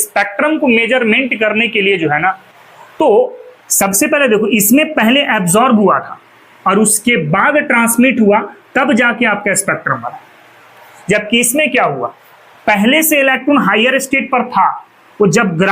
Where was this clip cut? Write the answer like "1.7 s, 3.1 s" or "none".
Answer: 2.5 s

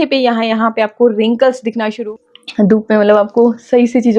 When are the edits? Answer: 1.9 s

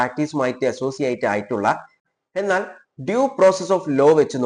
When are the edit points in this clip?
2.0 s

